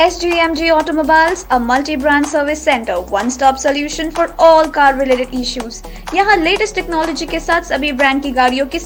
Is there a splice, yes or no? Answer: no